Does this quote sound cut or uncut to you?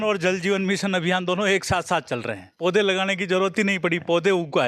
uncut